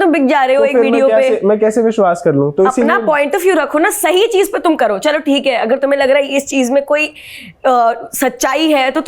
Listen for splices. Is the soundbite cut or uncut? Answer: uncut